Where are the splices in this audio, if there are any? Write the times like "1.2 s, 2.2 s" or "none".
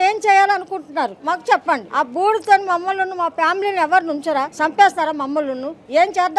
1.2 s, 1.9 s, 4.5 s